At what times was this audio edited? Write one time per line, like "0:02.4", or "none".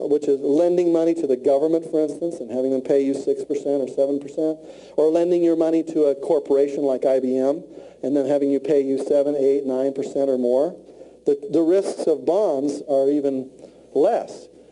0:10.0

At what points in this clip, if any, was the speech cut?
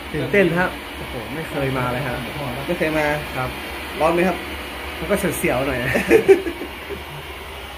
none

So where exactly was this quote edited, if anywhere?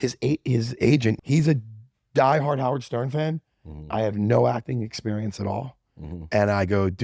0:01.2

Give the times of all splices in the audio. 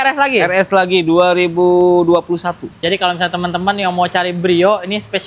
0:02.7

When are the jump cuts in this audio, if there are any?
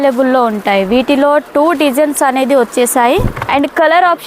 0:03.4

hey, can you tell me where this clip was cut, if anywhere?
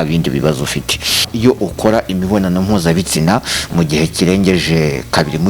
0:01.3

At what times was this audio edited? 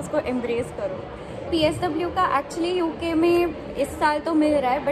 0:01.5

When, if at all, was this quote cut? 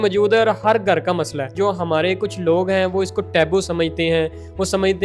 0:01.5

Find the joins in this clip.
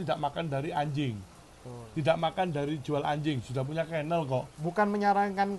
0:04.6

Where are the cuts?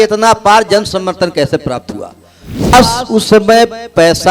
0:02.7

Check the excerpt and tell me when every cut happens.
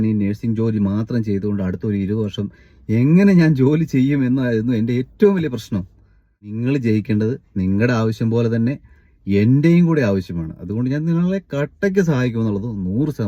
0:06.5

